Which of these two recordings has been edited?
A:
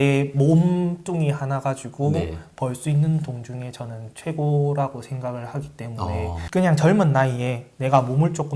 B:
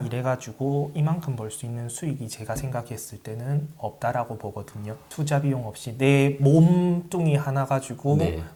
A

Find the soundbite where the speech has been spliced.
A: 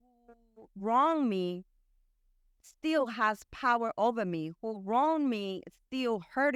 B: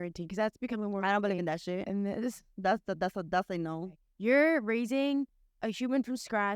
B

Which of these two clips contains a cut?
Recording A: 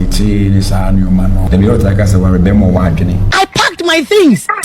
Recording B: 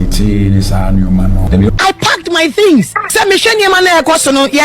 B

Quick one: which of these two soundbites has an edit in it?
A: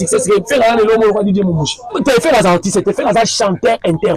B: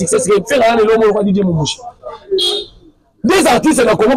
A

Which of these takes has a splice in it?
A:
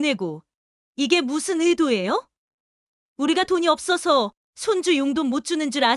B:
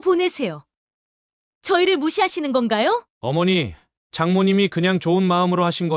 B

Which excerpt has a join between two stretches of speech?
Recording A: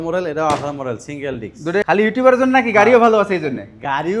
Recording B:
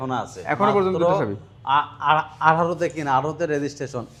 A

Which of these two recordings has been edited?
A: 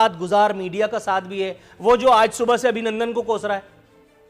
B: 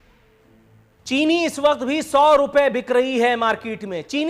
B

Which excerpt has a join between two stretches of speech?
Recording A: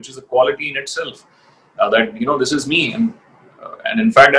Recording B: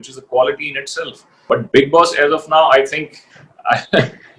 B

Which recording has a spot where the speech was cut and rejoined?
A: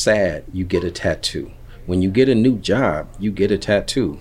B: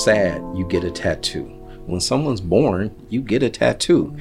B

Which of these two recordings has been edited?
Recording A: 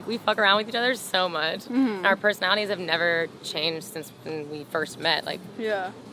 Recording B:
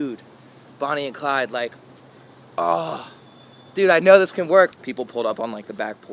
B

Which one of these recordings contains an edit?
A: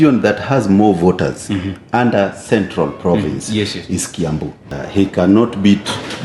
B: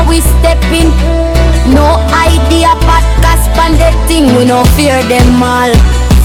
A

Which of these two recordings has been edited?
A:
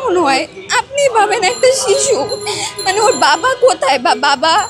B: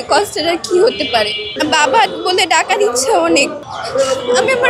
B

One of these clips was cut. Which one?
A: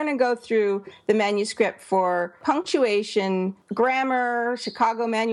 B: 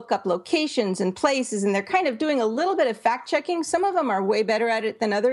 A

